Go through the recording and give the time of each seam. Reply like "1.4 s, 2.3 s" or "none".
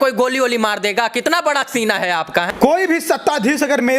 2.5 s